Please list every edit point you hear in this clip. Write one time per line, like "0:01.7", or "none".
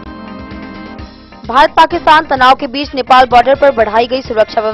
none